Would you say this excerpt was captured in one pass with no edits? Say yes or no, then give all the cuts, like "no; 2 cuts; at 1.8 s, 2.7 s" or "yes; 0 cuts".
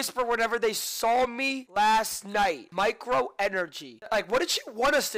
no; 3 cuts; at 1.6 s, 2.6 s, 4.0 s